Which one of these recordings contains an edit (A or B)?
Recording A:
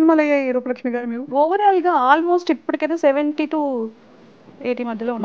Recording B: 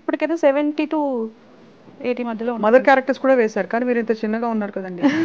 A